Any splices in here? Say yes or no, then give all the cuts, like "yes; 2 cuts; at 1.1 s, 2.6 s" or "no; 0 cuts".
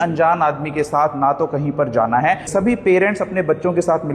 yes; 1 cut; at 2.5 s